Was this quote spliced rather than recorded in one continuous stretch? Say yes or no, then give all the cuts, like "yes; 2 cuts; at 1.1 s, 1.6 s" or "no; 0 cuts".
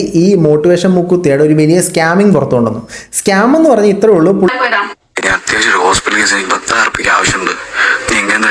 yes; 1 cut; at 4.5 s